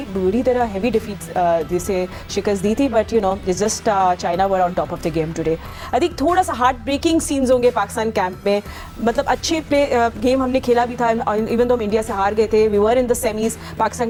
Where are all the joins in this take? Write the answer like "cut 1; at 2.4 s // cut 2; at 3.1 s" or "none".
none